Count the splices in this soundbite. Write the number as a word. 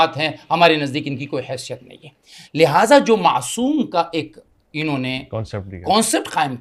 zero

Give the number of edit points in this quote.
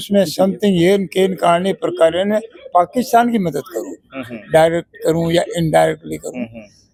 zero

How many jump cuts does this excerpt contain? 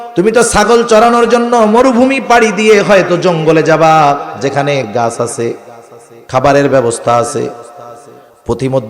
one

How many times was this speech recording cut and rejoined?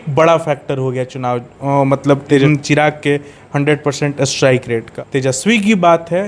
two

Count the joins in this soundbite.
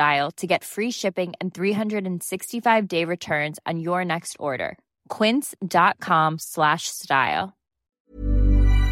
one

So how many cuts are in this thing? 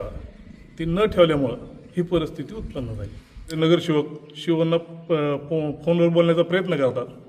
one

